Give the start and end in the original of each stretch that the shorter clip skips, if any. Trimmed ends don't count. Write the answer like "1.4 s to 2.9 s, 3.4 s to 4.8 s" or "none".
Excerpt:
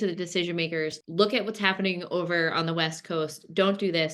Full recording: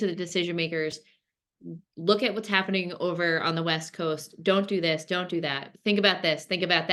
1.0 s to 1.9 s